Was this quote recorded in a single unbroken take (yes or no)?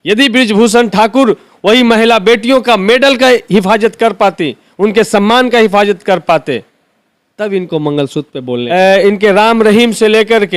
no